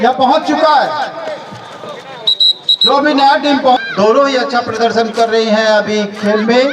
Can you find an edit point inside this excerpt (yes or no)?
yes